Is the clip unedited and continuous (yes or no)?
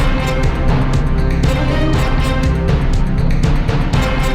yes